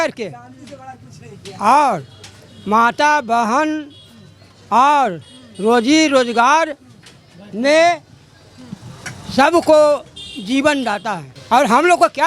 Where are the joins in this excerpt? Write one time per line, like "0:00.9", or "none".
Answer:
0:11.3